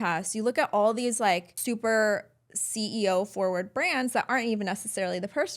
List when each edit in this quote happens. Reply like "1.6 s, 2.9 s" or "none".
1.5 s